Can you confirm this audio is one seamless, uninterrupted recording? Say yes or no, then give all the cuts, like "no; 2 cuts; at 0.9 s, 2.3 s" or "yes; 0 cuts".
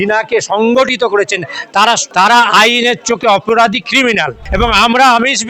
no; 2 cuts; at 2.0 s, 4.4 s